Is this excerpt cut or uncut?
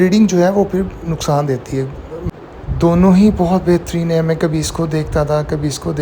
cut